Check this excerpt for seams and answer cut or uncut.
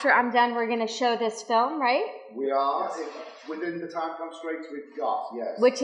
cut